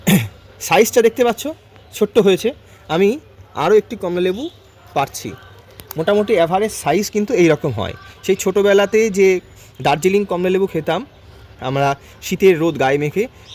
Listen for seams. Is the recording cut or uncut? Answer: uncut